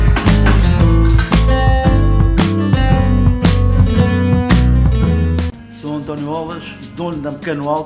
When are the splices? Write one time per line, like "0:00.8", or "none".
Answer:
none

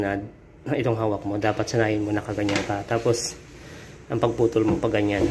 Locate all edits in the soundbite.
none

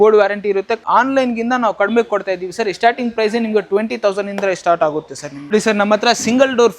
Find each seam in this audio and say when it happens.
0:00.8
0:05.5

